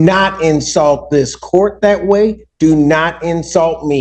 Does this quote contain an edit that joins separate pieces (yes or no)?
no